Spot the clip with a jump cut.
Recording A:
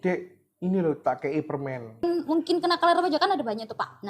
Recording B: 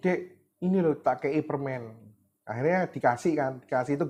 A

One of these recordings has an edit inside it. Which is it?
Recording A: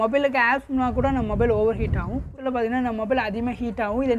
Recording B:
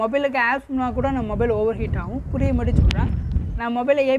A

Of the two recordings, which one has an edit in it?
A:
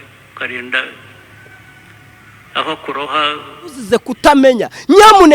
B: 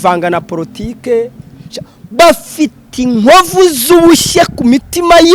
A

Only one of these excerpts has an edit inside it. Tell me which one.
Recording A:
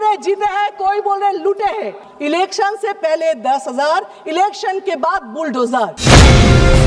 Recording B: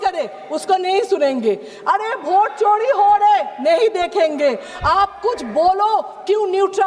A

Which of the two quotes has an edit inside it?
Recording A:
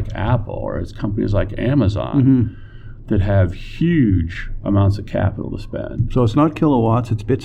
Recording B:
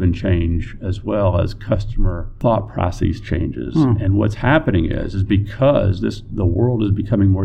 B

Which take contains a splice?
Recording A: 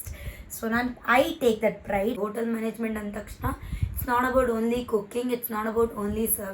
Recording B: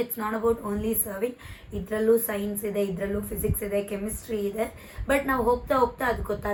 A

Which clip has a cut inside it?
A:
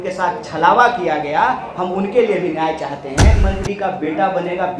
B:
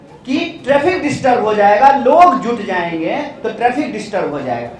A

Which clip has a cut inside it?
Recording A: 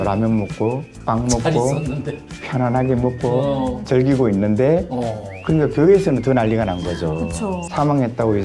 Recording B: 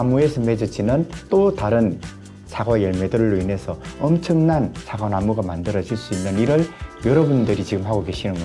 A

